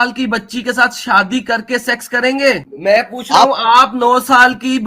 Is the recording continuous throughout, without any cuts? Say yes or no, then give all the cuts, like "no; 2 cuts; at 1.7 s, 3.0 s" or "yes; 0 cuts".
no; 1 cut; at 2.7 s